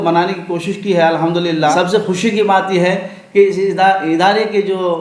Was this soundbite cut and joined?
yes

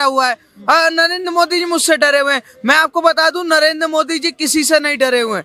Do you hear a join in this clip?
no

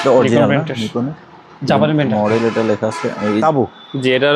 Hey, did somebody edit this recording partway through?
yes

